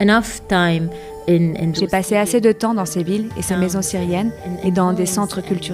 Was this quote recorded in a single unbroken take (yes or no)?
no